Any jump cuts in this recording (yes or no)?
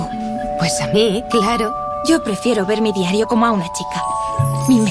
no